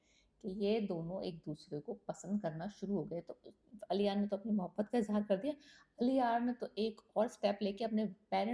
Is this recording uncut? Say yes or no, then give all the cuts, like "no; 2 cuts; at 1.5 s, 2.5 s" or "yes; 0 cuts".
yes; 0 cuts